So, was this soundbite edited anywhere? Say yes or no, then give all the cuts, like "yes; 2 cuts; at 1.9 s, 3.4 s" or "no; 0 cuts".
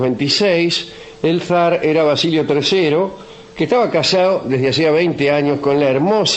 no; 0 cuts